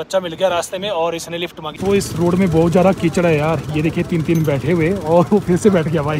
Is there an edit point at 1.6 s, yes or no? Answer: yes